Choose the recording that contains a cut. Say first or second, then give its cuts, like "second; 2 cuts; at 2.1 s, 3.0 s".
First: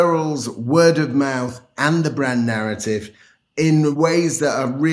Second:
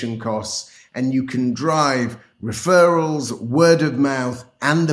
first; 1 cut; at 4.0 s